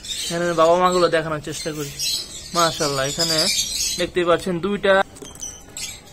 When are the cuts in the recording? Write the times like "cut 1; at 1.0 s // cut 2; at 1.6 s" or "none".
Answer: cut 1; at 5.0 s